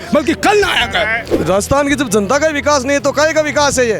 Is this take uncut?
no; 1 cut; at 1.2 s

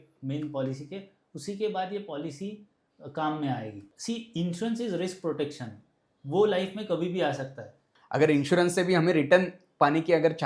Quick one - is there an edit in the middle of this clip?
yes; 2 cuts; at 3.9 s, 7.9 s

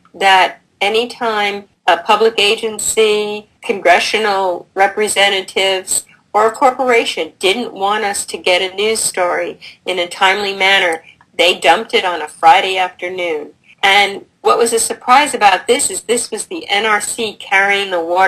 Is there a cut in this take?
yes; 1 cut; at 10.0 s

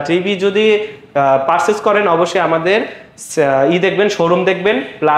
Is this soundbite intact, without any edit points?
yes; 0 cuts

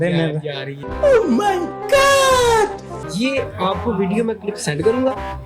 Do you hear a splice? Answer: yes; 1 cut; at 3.0 s

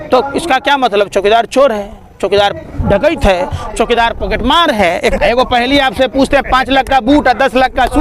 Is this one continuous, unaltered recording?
no; 1 cut; at 5.1 s

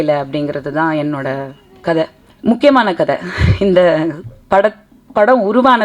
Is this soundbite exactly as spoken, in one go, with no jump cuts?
no; 1 cut; at 2.2 s

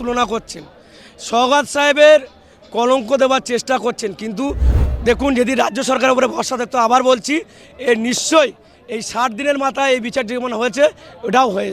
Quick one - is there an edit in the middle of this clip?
yes; 1 cut; at 4.7 s

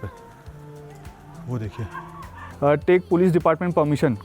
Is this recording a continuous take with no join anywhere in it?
no; 1 cut; at 2.4 s

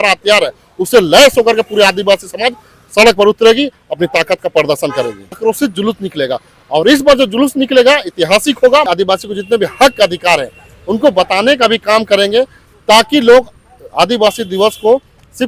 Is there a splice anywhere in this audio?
yes; 2 cuts; at 5.4 s, 8.9 s

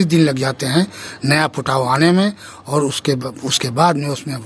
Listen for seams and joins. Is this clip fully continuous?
yes; 0 cuts

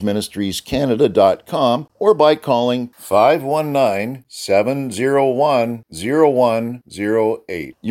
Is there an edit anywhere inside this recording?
yes; 1 cut; at 1.9 s

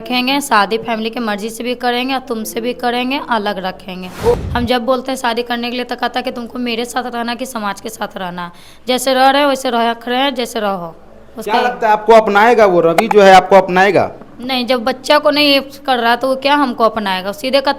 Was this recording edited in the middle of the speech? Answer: yes; 1 cut; at 4.4 s

